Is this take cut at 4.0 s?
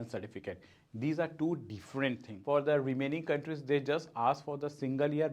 no; 1 cut; at 2.3 s

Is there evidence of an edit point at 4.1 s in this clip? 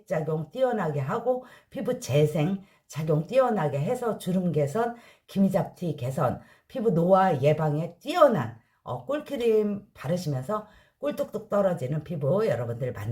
no; 0 cuts

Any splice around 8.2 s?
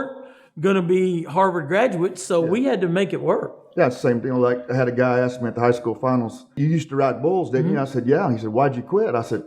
no; 1 cut; at 6.6 s

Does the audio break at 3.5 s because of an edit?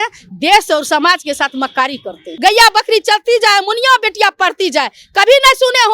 no; 1 cut; at 2.3 s

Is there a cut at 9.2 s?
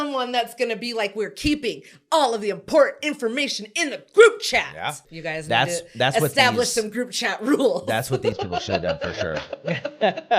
no; 1 cut; at 5.1 s

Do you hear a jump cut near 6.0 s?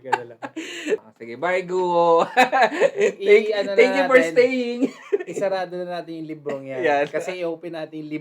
no; 1 cut; at 1.0 s

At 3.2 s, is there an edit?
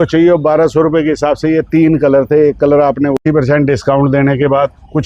yes; 1 cut; at 3.2 s

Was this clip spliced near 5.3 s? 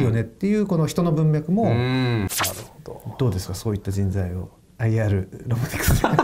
no; 1 cut; at 2.3 s

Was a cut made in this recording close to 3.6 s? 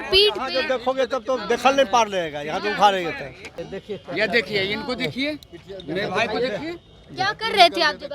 yes; 1 cut; at 3.6 s

